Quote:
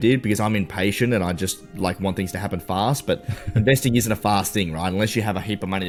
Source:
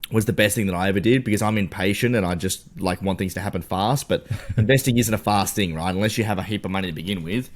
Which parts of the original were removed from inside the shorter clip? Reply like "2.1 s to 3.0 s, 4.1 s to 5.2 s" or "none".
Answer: none

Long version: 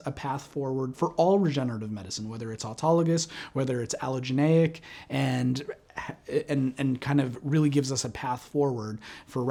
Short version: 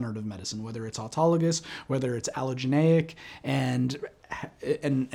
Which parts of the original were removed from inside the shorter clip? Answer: none

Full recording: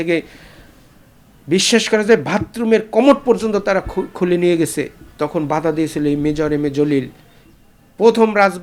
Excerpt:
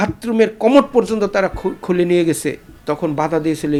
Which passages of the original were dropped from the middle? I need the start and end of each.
none

